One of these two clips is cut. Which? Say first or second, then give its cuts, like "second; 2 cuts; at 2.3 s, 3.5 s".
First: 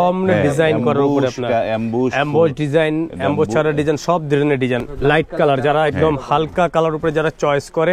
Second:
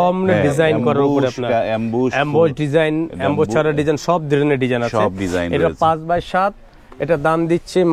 first; 1 cut; at 4.9 s